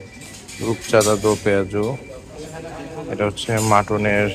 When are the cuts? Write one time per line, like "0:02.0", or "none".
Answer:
none